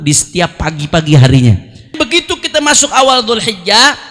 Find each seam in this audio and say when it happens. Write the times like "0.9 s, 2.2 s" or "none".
2.0 s